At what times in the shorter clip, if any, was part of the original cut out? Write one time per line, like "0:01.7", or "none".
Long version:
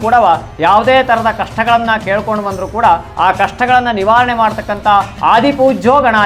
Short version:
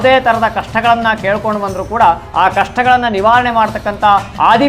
none